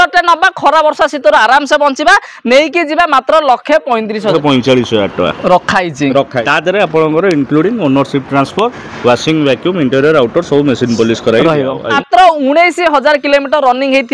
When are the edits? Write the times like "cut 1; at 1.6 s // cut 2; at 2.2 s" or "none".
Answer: cut 1; at 4.3 s // cut 2; at 6.4 s // cut 3; at 11.9 s